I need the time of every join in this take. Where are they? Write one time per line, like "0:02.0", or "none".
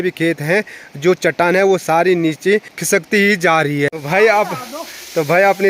0:02.7
0:03.9